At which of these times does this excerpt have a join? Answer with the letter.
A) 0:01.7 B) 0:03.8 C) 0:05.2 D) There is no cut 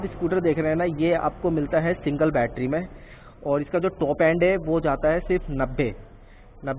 D